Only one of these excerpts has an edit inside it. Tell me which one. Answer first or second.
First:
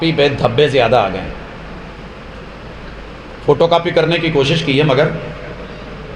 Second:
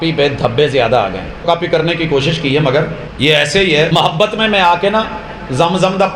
second